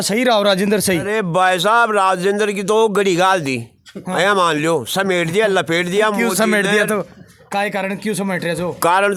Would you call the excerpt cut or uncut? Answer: uncut